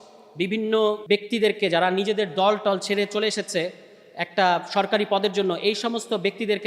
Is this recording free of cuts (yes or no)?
no